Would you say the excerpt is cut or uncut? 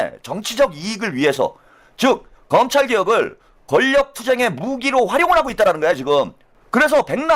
uncut